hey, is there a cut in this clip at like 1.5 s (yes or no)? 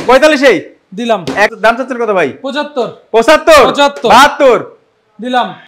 yes